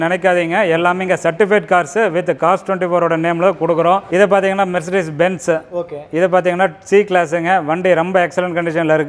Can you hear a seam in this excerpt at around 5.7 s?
no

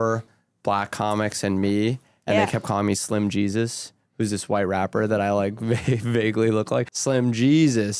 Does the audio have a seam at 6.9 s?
yes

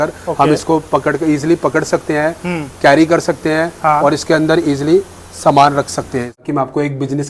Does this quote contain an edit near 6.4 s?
yes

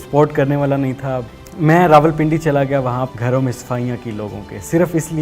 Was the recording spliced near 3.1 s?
yes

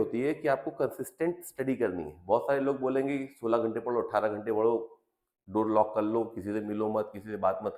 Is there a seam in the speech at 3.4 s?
no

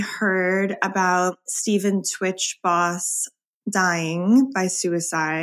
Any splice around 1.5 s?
yes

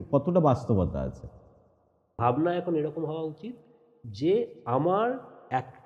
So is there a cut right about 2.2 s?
yes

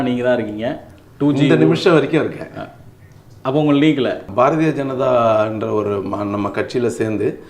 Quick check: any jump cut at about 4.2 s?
yes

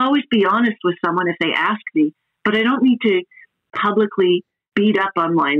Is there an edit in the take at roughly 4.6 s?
yes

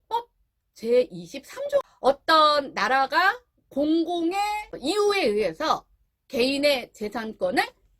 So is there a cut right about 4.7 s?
yes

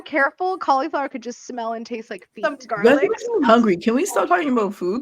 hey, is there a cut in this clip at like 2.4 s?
yes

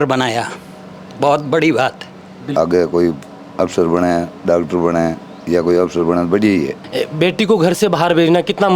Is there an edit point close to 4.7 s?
no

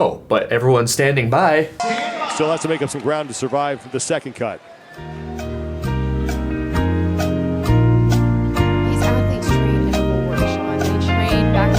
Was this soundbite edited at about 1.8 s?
yes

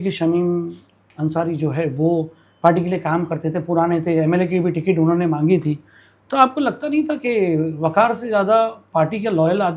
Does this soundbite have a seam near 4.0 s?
no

